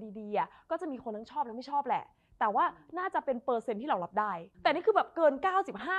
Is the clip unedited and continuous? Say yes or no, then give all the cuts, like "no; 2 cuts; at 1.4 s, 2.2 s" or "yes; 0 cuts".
no; 1 cut; at 4.5 s